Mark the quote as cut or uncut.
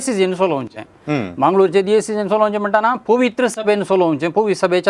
uncut